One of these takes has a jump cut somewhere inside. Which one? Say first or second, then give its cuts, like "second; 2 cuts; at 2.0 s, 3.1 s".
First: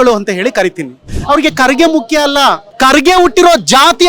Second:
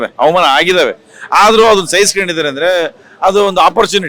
first; 2 cuts; at 1.1 s, 2.7 s